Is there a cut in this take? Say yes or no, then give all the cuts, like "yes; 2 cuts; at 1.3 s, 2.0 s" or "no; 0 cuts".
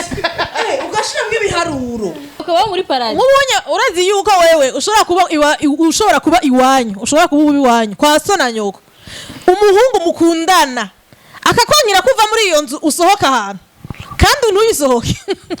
yes; 1 cut; at 2.4 s